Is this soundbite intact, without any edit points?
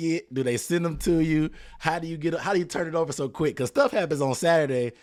yes; 0 cuts

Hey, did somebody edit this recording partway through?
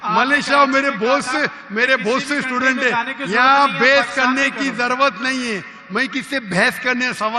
no; 0 cuts

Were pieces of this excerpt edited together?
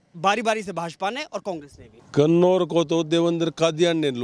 no; 0 cuts

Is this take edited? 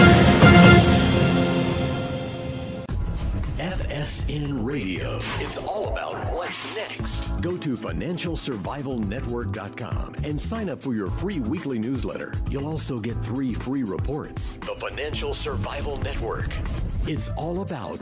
yes; 1 cut; at 2.8 s

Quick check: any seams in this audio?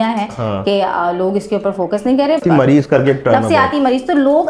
yes; 1 cut; at 2.4 s

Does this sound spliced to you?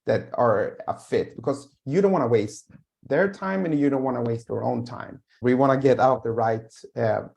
yes; 1 cut; at 5.3 s

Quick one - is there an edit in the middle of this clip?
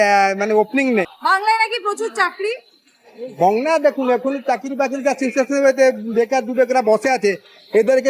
no; 0 cuts

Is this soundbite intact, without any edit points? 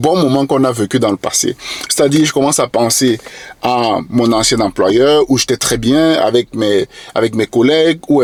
yes; 0 cuts

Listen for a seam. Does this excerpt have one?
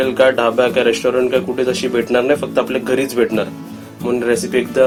no; 0 cuts

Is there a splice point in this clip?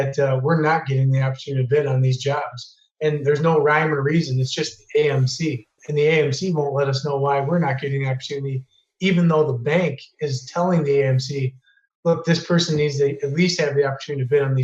no; 0 cuts

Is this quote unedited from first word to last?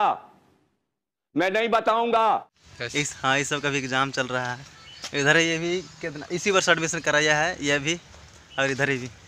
yes; 0 cuts

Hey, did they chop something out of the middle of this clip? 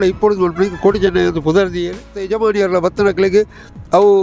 yes; 1 cut; at 2.2 s

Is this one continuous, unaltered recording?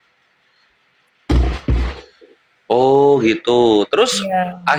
yes; 0 cuts

